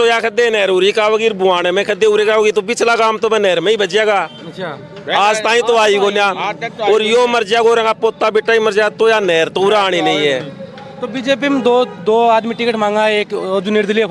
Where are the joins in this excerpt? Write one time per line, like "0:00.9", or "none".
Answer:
none